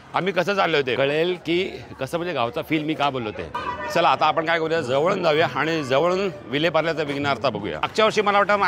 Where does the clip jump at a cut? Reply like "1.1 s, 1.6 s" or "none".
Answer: 1.0 s, 3.6 s, 7.9 s